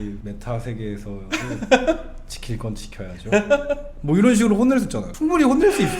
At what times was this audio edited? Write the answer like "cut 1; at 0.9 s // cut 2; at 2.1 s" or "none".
cut 1; at 5.1 s